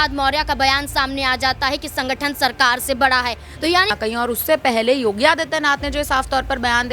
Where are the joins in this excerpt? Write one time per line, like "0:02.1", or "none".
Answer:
0:03.9